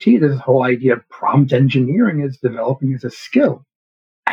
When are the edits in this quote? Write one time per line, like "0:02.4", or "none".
none